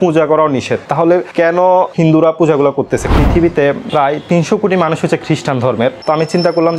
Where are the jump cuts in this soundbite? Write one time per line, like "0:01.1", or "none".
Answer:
0:00.9
0:03.1